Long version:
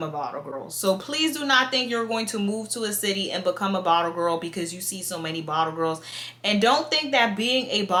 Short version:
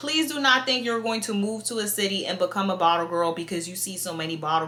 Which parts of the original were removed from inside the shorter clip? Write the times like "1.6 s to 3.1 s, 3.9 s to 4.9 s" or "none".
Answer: none